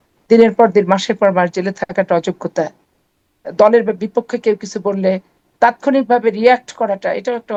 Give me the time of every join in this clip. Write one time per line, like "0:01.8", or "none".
none